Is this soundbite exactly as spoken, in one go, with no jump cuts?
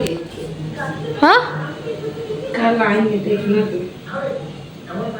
yes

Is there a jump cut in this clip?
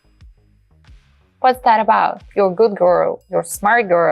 yes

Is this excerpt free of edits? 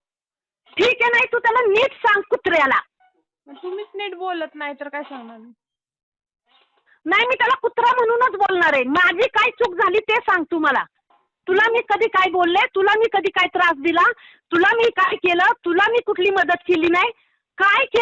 yes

